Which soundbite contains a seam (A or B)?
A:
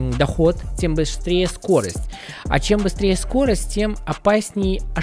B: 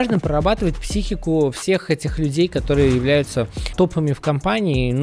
B